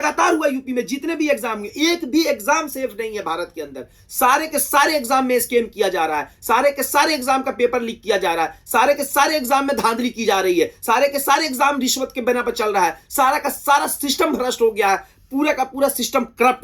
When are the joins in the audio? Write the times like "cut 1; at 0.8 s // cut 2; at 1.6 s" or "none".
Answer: none